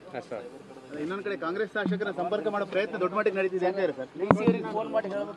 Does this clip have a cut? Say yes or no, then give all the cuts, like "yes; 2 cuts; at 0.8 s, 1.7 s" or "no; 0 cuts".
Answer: no; 0 cuts